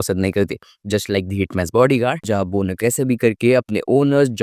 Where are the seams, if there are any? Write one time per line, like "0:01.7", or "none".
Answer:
0:02.2